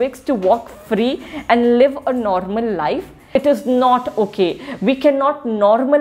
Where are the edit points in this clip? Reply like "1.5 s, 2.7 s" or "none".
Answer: 3.4 s